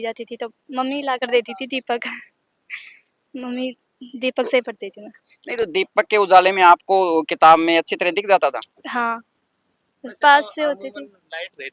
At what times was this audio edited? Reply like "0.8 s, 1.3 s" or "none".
none